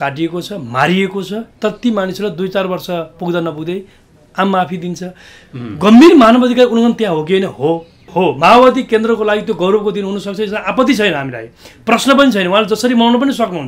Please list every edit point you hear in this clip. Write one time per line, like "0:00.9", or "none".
0:08.0